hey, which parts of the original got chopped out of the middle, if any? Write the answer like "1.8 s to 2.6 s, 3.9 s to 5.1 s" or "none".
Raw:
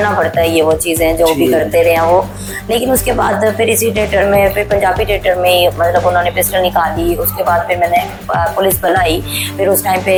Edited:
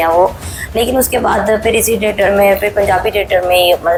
none